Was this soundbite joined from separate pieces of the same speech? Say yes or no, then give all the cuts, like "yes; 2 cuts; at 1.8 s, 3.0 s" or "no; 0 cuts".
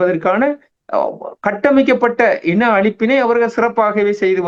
no; 0 cuts